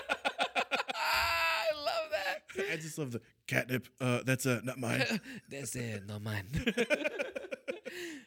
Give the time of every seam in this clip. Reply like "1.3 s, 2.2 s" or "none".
none